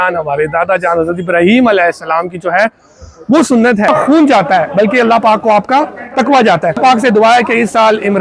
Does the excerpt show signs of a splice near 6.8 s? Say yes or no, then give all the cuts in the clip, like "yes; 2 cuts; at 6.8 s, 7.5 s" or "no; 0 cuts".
yes; 2 cuts; at 3.9 s, 6.8 s